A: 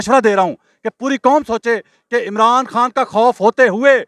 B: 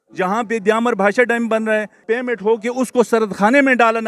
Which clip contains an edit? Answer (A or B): B